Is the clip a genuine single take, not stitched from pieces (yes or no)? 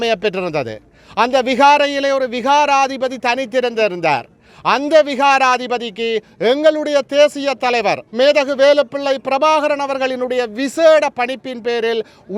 yes